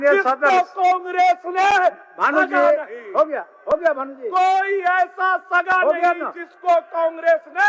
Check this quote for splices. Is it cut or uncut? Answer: uncut